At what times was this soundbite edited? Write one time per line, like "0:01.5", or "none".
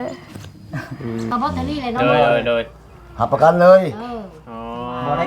0:01.3